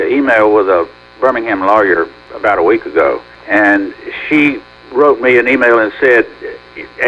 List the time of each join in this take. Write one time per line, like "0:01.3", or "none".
0:02.2
0:03.3
0:04.7